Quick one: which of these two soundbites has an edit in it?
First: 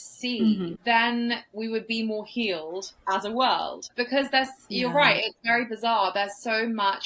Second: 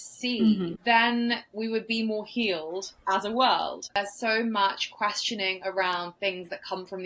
second; 1 cut; at 3.9 s

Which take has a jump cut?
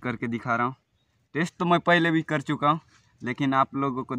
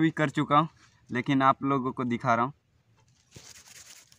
second; 1 cut; at 3.0 s

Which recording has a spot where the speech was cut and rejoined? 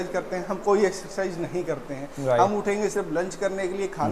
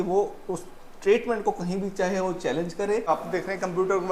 second; 1 cut; at 3.1 s

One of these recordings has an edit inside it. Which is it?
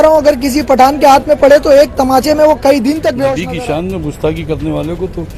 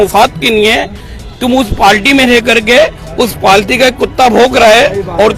first; 1 cut; at 3.3 s

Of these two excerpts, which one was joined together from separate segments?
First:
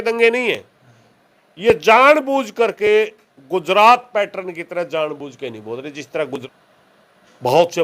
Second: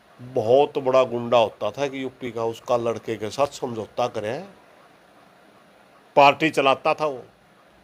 first; 1 cut; at 6.4 s

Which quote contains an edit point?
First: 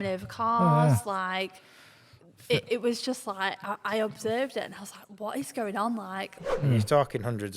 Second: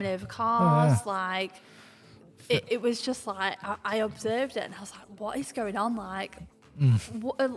first; 1 cut; at 6.4 s

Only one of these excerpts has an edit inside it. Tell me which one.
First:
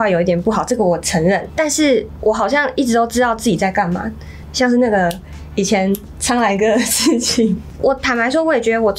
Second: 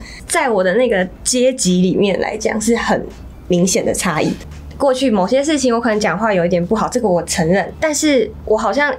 first; 2 cuts; at 4.4 s, 7.7 s

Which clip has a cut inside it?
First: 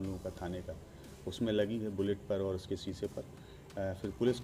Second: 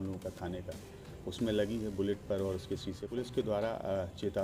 second; 1 cut; at 3.1 s

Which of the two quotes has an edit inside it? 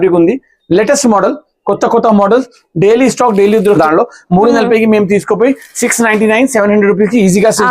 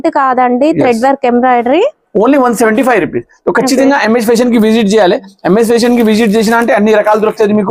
first; 1 cut; at 3.8 s

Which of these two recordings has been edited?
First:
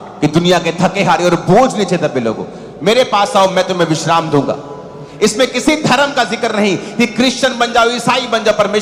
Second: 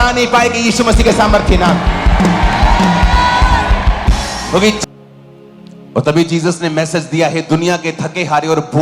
second; 1 cut; at 4.8 s

